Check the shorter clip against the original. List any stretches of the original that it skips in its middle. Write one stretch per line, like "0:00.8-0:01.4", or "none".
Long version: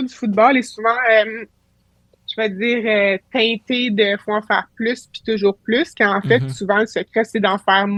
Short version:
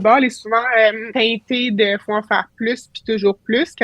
0:01.4-0:03.2